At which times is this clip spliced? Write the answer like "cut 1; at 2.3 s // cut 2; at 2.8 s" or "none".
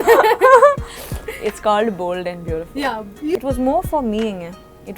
cut 1; at 3.4 s